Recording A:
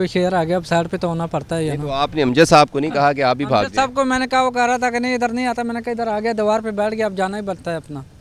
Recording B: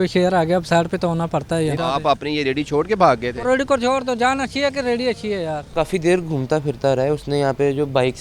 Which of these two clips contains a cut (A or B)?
B